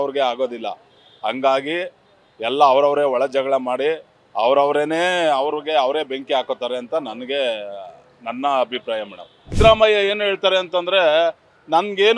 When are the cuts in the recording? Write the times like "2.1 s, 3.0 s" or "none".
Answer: 9.5 s